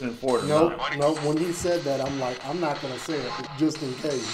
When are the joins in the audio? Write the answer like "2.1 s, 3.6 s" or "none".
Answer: 3.4 s

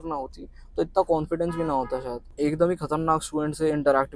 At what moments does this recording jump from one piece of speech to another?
2.2 s

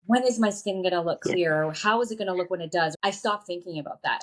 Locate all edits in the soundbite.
3.0 s

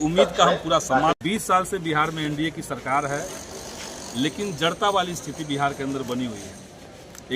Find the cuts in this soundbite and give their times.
1.2 s

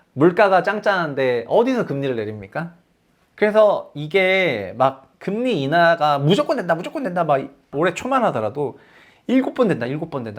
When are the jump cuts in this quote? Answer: 7.7 s

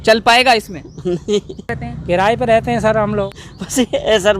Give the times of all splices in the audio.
1.9 s, 3.4 s

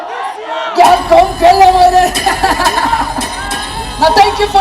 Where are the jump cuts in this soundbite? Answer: none

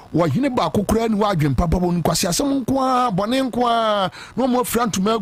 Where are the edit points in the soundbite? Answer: none

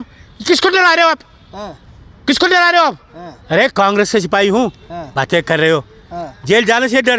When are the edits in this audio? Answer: none

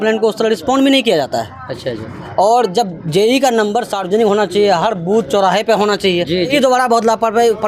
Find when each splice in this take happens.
6.5 s

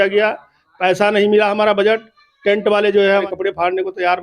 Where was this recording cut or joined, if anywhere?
3.2 s

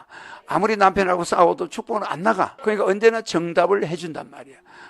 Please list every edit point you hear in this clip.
2.5 s

